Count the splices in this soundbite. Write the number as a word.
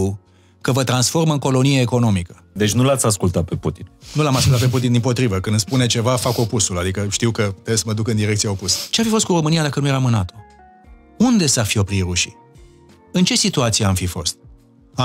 two